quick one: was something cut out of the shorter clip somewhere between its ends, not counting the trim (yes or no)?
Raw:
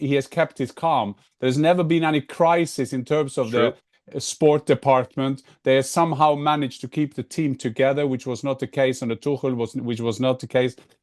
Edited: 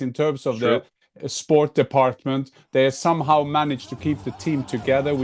no